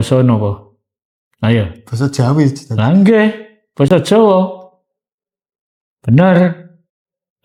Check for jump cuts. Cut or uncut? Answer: uncut